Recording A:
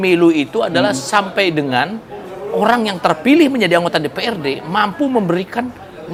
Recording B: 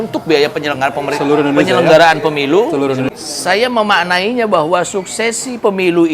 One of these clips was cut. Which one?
B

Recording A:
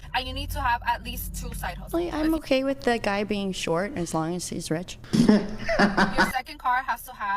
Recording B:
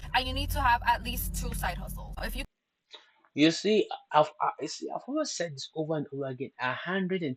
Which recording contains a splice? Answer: A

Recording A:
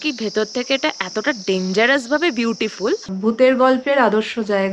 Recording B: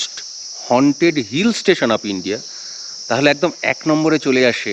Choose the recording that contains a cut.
A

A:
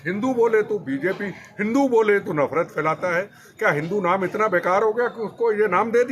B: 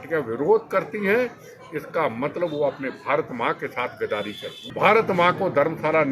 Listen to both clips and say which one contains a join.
B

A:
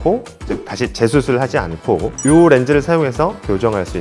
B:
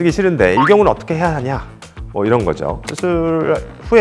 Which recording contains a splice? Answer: B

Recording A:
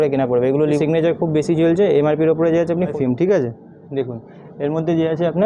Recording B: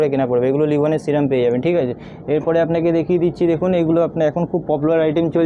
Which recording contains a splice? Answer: A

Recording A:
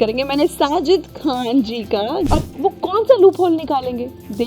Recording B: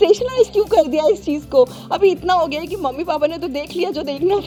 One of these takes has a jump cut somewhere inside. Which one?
A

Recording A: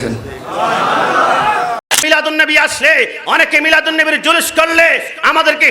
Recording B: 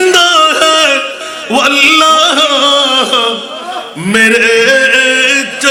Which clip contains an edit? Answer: A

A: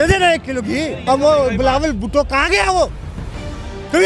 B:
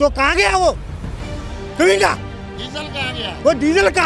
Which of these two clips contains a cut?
A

